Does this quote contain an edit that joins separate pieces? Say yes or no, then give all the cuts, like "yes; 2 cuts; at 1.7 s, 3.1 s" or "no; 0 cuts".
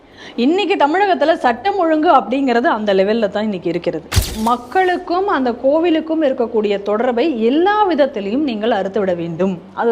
yes; 1 cut; at 4.3 s